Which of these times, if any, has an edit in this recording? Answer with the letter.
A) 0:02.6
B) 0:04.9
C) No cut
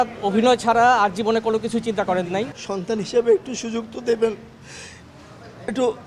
A